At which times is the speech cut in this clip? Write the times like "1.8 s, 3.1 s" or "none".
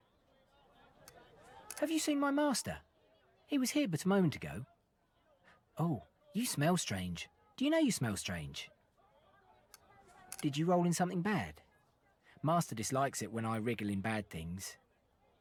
none